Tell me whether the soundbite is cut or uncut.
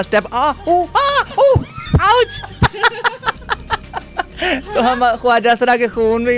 uncut